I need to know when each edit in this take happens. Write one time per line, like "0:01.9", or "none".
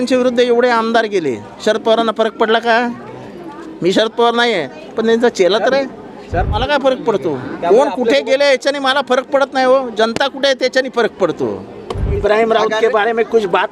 0:06.5
0:12.2